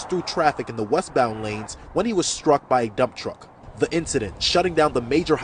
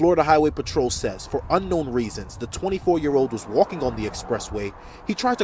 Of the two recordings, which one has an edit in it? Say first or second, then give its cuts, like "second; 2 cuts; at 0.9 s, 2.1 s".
first; 1 cut; at 3.6 s